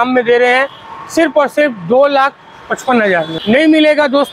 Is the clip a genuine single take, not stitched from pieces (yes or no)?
no